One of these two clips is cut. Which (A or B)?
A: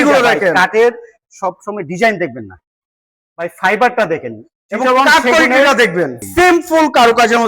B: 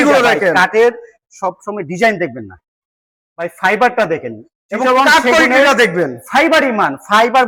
A